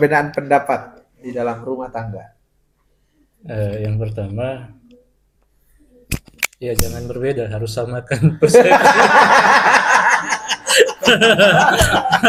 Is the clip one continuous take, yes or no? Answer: yes